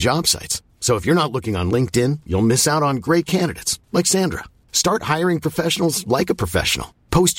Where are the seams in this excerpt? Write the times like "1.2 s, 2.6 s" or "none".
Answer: none